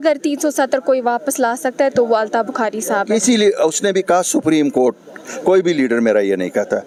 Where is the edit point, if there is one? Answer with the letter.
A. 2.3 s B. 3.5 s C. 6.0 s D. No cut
D